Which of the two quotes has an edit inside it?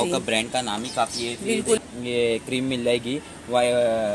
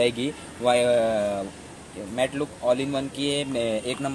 first; 1 cut; at 1.8 s

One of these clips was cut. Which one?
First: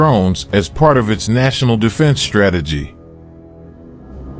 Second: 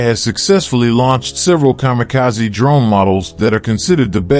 first; 1 cut; at 2.9 s

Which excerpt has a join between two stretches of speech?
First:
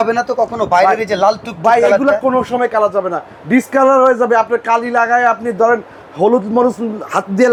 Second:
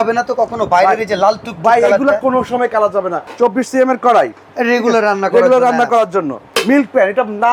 second; 2 cuts; at 3.2 s, 6.5 s

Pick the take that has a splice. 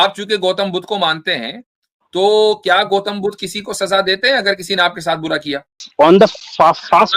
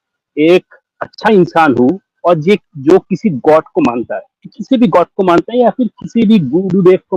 first; 1 cut; at 5.8 s

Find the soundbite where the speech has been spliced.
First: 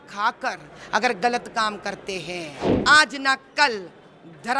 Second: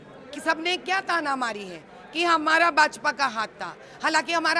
first; 1 cut; at 2.7 s

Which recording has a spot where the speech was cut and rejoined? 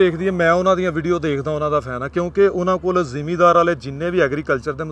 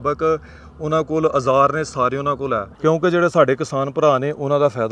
second; 1 cut; at 2.7 s

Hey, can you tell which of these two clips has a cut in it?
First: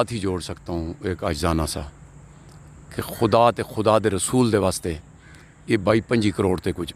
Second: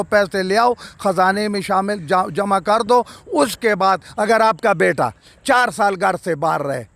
second; 1 cut; at 4.1 s

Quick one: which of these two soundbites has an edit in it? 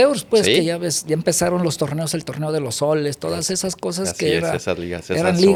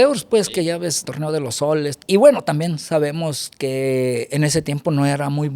second; 2 cuts; at 1.0 s, 2.0 s

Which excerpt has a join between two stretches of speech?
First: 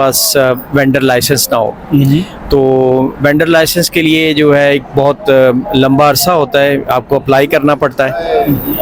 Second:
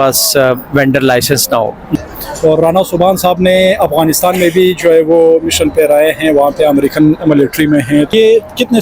second; 2 cuts; at 1.9 s, 8.1 s

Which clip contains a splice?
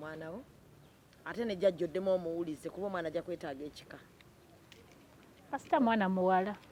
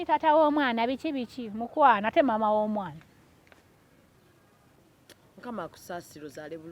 second; 1 cut; at 4.1 s

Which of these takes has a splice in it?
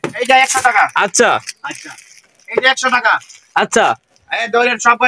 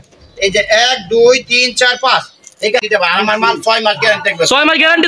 second; 1 cut; at 2.8 s

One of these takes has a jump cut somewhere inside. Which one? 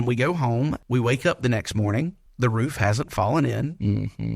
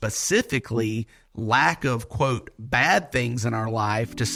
first; 2 cuts; at 0.8 s, 2.2 s

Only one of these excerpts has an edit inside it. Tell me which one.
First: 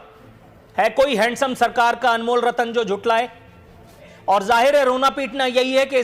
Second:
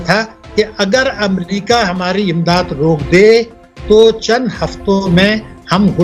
first; 1 cut; at 4.1 s

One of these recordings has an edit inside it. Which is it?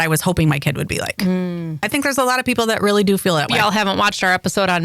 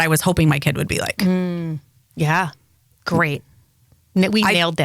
first; 2 cuts; at 1.8 s, 3.5 s

